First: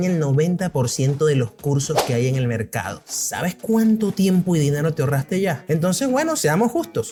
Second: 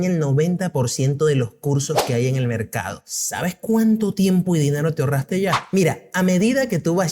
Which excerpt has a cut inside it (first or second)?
second